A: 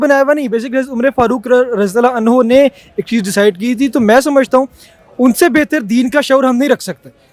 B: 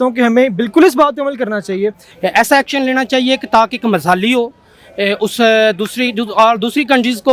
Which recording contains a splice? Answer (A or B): B